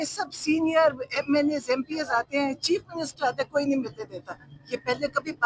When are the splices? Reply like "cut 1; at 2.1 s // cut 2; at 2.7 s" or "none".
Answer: none